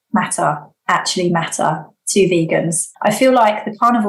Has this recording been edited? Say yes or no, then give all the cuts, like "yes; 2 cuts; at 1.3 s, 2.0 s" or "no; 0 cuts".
yes; 1 cut; at 2.8 s